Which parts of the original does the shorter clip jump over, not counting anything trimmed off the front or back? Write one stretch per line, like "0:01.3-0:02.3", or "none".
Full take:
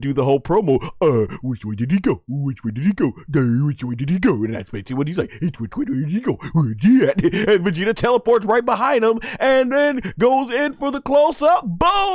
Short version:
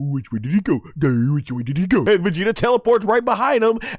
0:04.4-0:07.5